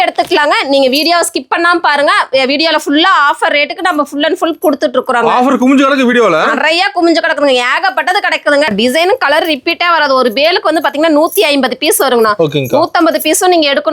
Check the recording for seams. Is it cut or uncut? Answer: cut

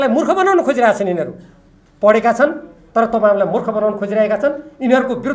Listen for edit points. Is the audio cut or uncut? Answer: uncut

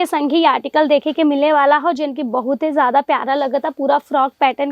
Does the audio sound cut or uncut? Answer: uncut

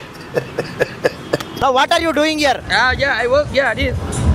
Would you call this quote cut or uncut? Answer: cut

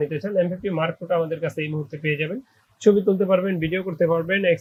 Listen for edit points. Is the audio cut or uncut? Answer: uncut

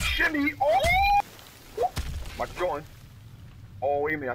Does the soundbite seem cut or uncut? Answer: cut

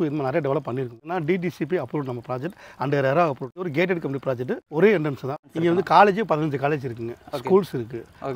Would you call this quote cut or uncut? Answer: cut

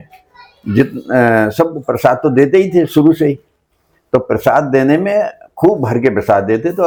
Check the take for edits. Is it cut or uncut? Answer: uncut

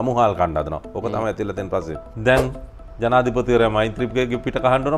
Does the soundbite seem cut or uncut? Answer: cut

